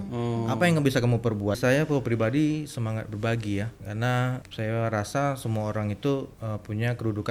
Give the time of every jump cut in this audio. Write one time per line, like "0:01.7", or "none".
0:01.6
0:03.9
0:06.4